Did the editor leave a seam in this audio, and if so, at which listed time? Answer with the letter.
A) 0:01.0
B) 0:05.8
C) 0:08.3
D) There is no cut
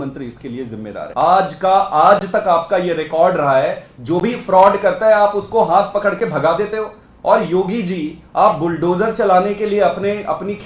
A